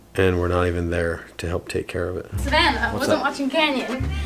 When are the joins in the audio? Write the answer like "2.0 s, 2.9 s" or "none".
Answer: 2.3 s